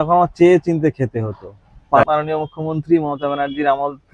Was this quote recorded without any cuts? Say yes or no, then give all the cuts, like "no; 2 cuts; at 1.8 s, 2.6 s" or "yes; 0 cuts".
no; 1 cut; at 2.0 s